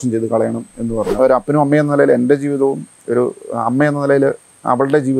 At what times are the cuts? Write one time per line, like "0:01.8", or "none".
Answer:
0:01.3